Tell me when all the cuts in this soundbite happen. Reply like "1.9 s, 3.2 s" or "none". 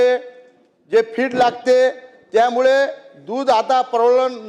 none